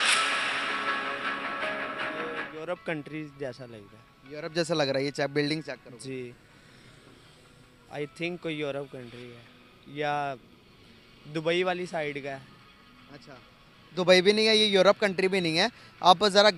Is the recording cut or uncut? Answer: uncut